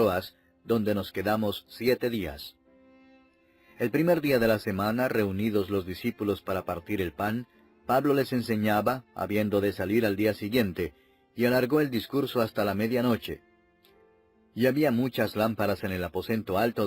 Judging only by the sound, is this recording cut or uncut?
cut